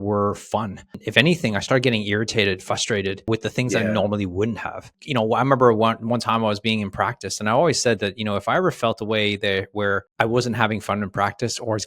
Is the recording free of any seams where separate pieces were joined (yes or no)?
no